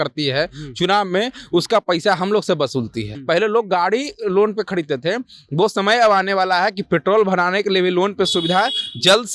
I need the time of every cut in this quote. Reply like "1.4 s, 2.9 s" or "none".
3.1 s